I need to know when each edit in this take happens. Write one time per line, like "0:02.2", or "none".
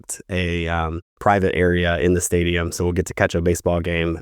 0:01.0